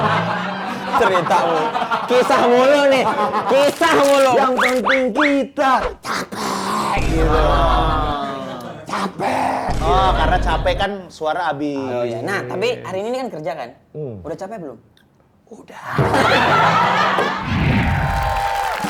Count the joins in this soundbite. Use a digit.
2